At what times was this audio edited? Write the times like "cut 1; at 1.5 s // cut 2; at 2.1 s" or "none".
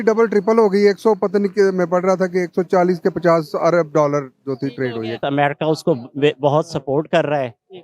cut 1; at 5.2 s